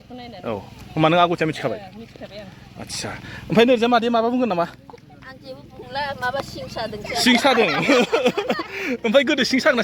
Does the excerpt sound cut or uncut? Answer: uncut